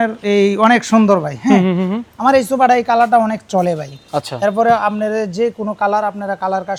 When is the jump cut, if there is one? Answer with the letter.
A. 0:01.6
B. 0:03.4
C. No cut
C